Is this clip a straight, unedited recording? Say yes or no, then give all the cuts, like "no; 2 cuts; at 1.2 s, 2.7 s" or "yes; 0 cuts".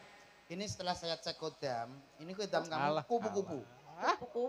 yes; 0 cuts